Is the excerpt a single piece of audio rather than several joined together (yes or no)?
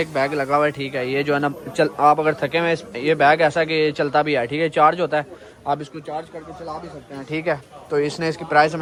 yes